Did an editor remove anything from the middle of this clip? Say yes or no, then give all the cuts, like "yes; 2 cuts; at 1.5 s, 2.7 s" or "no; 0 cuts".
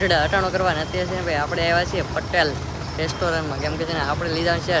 no; 0 cuts